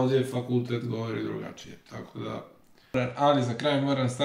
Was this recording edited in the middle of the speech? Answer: yes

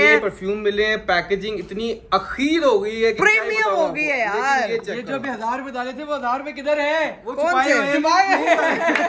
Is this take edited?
no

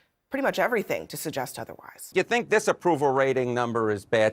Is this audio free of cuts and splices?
no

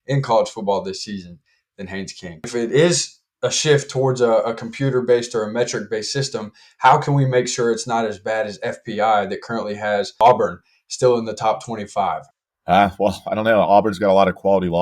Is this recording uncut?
no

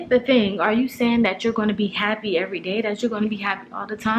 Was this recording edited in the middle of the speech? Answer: no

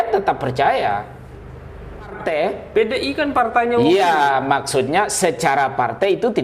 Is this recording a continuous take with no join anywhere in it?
no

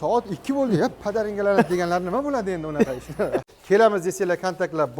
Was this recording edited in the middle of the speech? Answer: yes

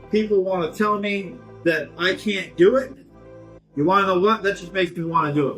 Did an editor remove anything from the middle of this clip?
no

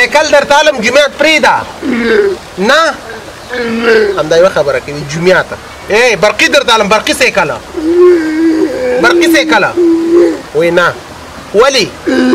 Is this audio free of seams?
yes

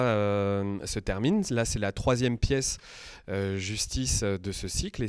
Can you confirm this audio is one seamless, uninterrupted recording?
yes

